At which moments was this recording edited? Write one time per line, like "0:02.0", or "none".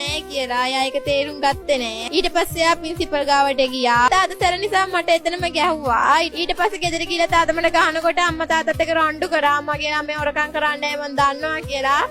0:02.0
0:04.1

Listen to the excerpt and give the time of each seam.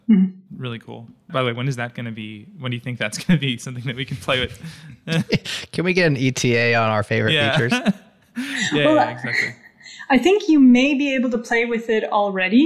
none

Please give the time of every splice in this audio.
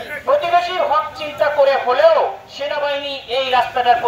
none

